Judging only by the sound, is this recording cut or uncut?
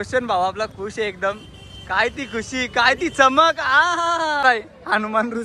cut